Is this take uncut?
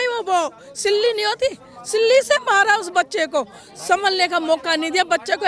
yes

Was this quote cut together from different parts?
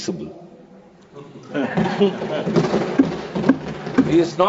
no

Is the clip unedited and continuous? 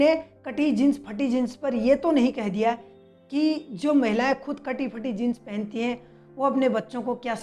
yes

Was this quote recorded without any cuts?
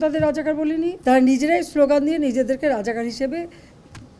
no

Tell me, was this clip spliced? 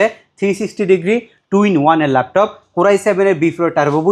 no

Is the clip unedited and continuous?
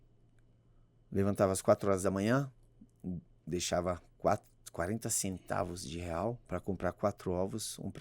no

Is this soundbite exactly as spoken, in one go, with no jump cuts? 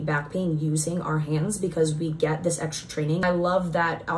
no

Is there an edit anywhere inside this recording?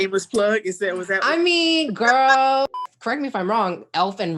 yes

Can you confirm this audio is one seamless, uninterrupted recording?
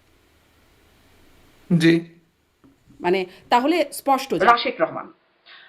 no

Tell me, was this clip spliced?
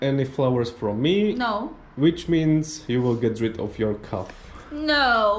no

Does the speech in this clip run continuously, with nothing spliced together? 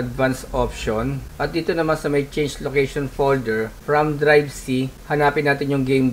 yes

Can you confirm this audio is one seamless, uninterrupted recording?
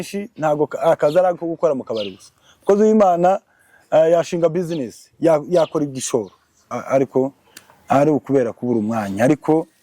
no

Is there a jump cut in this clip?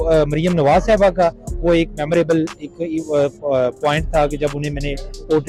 no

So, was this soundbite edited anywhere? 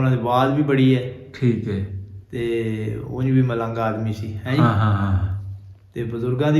no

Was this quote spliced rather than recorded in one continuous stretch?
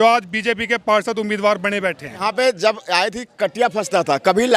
yes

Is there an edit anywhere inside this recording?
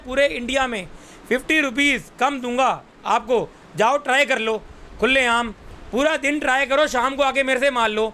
no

